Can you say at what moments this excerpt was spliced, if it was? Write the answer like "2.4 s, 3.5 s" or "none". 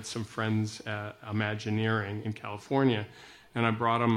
2.2 s